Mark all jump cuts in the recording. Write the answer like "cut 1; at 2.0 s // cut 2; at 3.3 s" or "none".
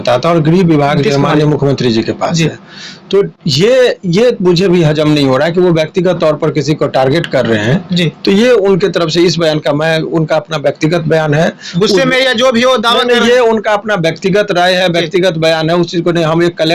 none